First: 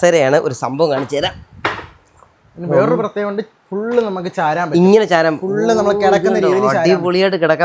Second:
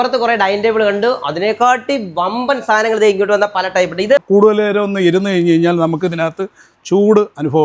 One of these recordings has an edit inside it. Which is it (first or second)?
second